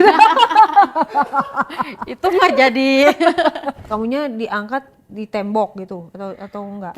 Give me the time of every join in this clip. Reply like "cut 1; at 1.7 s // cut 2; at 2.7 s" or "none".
cut 1; at 3.8 s